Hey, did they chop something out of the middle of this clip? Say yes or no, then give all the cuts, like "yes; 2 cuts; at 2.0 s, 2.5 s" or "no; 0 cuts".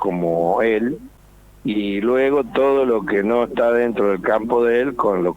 yes; 1 cut; at 1.1 s